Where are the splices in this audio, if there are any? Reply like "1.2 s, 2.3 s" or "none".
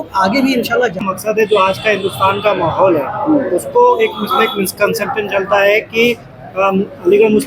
1.2 s